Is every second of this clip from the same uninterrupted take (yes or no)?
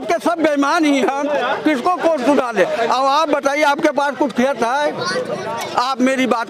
yes